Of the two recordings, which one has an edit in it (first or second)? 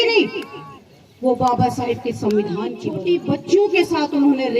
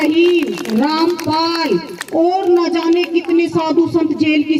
first